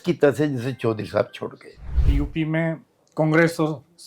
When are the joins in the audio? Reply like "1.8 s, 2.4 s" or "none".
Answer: 2.1 s